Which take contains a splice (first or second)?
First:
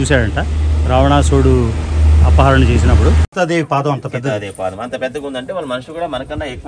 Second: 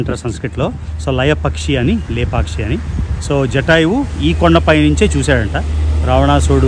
first